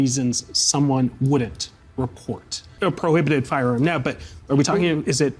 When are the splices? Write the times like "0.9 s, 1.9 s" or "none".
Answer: 2.6 s